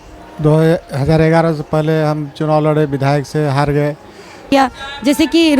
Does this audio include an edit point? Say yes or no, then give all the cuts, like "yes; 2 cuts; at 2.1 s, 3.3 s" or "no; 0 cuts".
yes; 1 cut; at 4.5 s